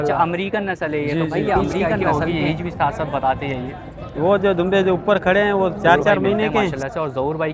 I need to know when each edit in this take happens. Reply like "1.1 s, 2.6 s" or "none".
1.9 s, 6.8 s

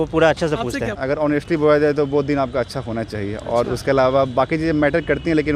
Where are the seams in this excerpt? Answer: 0.9 s

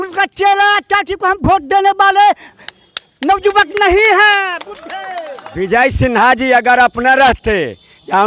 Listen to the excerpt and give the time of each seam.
5.6 s

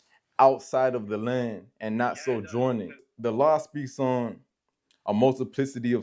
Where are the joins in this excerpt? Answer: 3.1 s

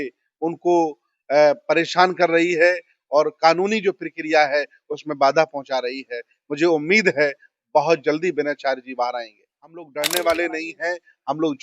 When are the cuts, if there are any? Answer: 9.8 s

